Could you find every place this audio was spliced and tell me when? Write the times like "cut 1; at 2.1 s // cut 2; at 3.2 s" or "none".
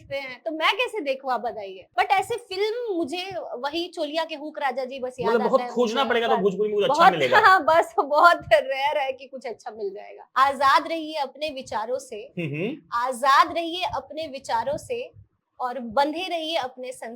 cut 1; at 1.8 s // cut 2; at 10.2 s